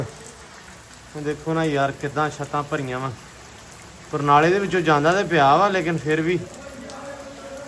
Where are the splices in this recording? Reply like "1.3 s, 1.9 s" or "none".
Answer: none